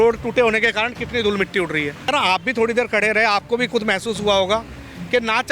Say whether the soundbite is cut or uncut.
cut